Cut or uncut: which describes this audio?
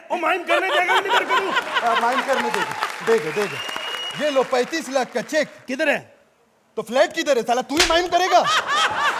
uncut